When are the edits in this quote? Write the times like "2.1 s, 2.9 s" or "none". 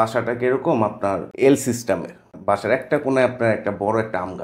1.3 s, 2.3 s

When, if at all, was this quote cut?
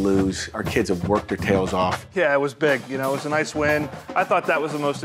2.0 s, 4.0 s

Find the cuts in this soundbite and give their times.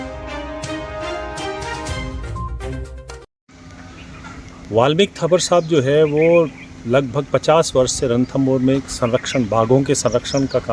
3.1 s

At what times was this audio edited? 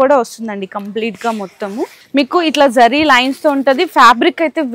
2.0 s

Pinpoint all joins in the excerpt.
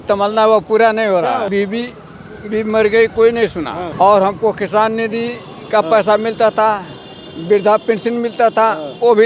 1.5 s, 3.8 s

